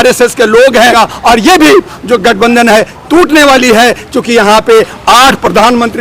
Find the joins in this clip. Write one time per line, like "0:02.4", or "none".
0:00.9